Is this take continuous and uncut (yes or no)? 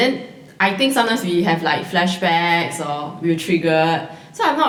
yes